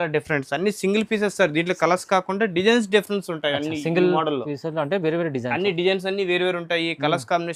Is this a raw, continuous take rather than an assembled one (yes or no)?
yes